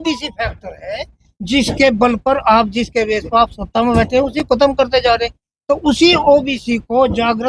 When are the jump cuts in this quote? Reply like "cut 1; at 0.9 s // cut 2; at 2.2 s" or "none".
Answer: none